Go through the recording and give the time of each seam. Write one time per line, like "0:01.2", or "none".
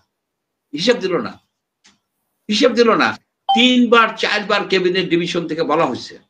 none